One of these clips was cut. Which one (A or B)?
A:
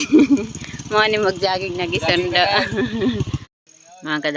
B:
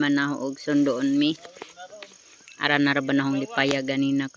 A